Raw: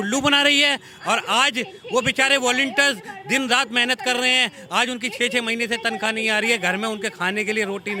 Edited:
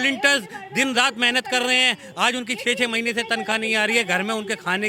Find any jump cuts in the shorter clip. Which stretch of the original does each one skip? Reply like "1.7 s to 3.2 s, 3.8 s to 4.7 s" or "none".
none